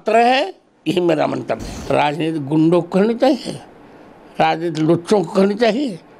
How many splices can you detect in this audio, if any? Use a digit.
1